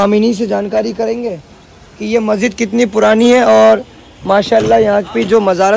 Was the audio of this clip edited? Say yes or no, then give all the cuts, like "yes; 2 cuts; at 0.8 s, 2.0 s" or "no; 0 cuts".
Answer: no; 0 cuts